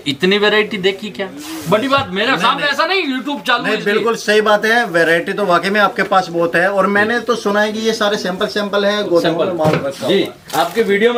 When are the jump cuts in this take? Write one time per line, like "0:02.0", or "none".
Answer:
none